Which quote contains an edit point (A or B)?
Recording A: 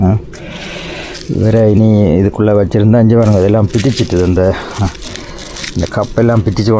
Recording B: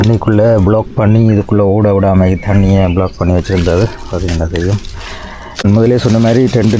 B